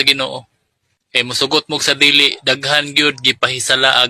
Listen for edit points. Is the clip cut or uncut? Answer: uncut